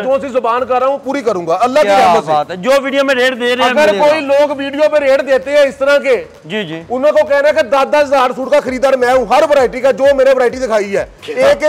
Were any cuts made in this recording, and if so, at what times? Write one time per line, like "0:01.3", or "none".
none